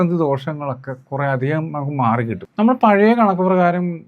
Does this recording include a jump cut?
yes; 1 cut; at 2.4 s

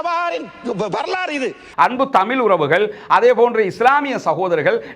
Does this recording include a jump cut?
yes; 1 cut; at 1.7 s

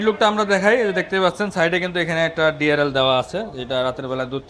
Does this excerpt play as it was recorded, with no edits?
yes; 0 cuts

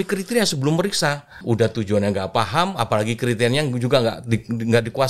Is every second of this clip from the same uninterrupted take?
no; 1 cut; at 1.3 s

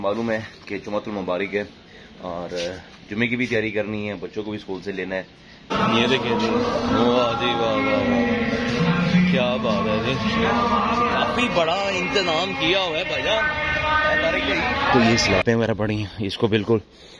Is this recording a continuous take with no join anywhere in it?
no; 2 cuts; at 5.7 s, 14.9 s

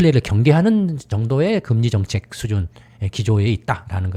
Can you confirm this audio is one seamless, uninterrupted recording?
yes; 0 cuts

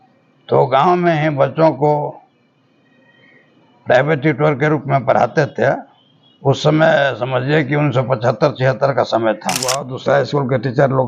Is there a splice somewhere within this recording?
yes; 1 cut; at 9.9 s

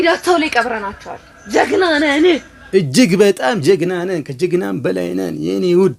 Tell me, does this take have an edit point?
no; 0 cuts

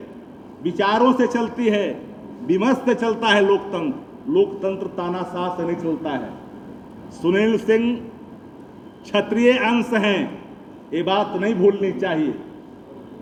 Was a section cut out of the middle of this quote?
no; 0 cuts

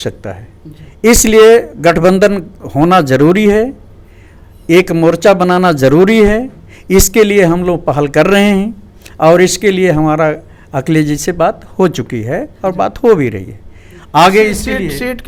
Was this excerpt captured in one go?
yes; 0 cuts

